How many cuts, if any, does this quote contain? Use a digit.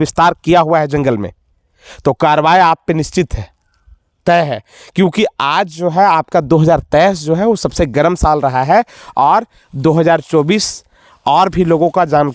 0